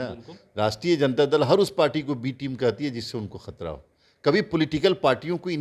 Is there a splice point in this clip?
no; 0 cuts

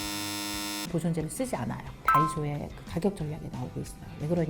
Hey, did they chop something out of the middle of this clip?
yes; 1 cut; at 2.2 s

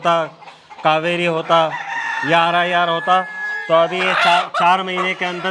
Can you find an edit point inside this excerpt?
no; 0 cuts

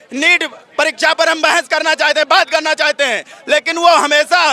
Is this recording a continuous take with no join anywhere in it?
yes; 0 cuts

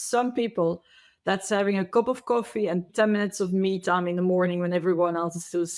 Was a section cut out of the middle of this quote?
yes; 1 cut; at 2.9 s

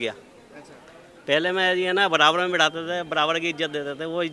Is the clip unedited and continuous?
yes; 0 cuts

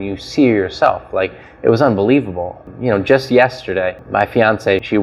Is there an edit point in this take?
no; 0 cuts

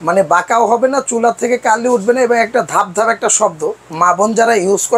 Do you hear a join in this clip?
no; 0 cuts

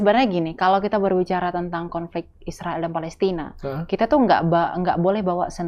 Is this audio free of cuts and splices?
yes; 0 cuts

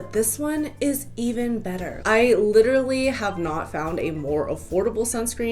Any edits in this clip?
yes; 1 cut; at 1.9 s

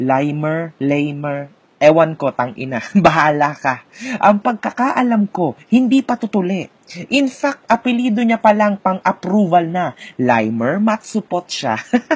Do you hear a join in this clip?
no; 0 cuts

